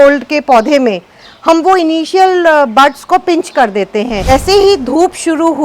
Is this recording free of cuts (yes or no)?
no